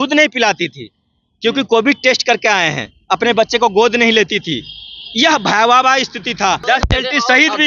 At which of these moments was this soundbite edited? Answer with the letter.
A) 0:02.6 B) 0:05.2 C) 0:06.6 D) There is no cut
C